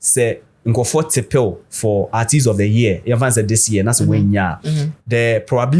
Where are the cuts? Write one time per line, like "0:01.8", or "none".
none